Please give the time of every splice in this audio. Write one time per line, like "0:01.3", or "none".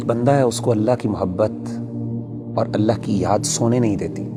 none